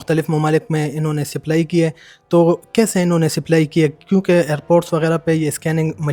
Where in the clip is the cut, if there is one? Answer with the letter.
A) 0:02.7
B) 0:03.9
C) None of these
C